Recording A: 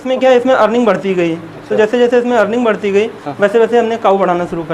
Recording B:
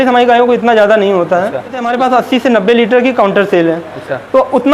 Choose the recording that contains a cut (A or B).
B